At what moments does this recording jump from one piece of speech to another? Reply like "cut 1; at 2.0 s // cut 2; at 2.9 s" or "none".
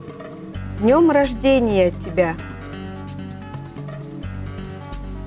cut 1; at 2.4 s // cut 2; at 4.2 s